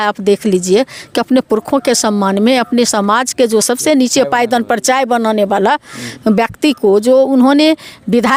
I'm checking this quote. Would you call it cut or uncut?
uncut